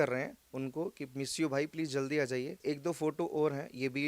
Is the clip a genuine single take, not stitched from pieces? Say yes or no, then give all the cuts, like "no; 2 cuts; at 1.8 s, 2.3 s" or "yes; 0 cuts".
no; 1 cut; at 2.6 s